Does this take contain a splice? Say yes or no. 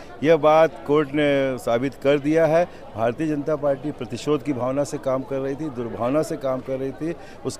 no